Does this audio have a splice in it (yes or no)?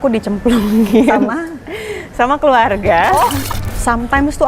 yes